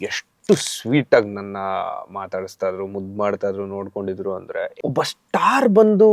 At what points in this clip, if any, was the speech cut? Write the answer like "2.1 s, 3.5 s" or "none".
4.7 s